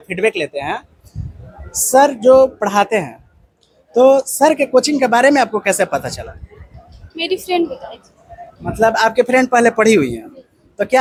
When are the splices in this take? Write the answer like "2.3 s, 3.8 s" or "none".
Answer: none